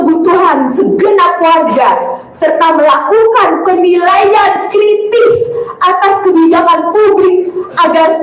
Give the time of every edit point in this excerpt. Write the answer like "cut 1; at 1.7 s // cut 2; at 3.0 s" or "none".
none